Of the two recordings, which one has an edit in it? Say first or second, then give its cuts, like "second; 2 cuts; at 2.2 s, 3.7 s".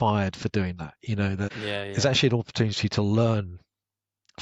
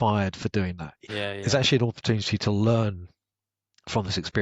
second; 1 cut; at 1.0 s